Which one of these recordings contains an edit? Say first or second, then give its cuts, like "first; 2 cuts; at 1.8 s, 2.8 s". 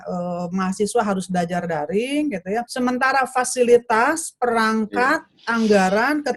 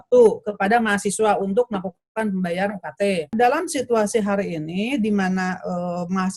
second; 1 cut; at 3.3 s